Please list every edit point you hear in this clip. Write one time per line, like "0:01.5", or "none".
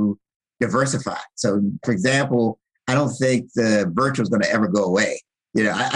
0:01.8